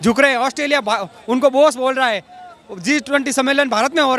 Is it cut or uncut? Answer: uncut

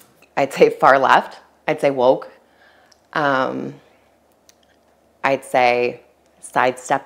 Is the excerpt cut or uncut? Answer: uncut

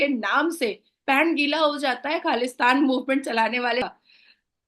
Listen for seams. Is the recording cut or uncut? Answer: uncut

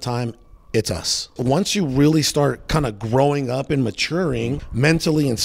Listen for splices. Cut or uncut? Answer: cut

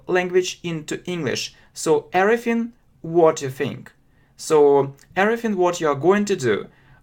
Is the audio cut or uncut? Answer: uncut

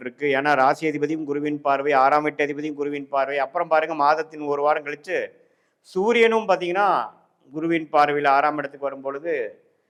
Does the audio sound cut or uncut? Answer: uncut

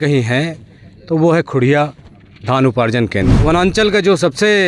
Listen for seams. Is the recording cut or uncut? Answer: cut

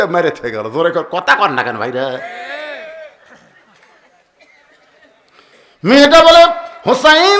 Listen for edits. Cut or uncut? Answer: uncut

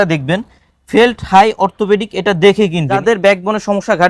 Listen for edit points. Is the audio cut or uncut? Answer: cut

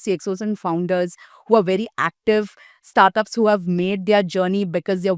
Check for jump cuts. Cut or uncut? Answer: uncut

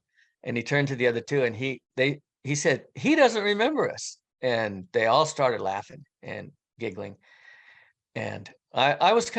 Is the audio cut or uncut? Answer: uncut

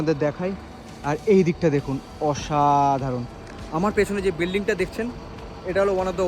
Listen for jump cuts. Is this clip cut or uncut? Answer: uncut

